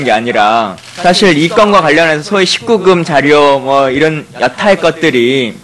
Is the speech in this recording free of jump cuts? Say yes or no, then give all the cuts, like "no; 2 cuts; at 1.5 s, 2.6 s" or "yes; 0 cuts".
yes; 0 cuts